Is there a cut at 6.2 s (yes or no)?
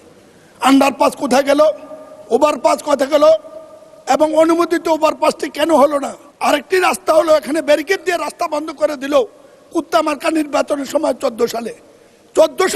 yes